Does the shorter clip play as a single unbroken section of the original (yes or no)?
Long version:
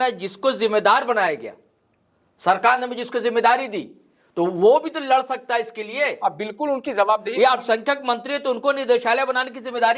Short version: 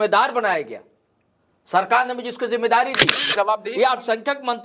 no